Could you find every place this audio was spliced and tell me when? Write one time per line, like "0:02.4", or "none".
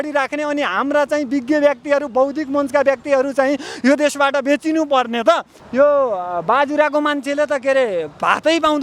0:05.5